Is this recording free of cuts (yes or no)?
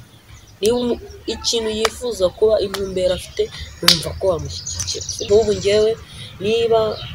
no